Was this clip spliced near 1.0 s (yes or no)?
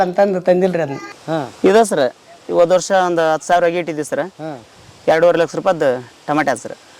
yes